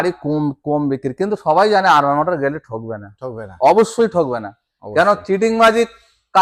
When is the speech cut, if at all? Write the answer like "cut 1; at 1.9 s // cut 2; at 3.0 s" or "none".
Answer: none